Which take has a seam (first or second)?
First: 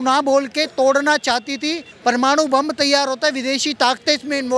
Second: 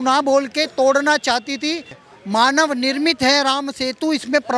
second